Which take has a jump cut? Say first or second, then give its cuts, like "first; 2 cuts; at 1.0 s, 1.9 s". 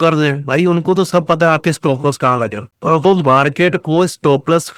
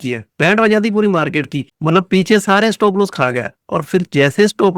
second; 1 cut; at 1.7 s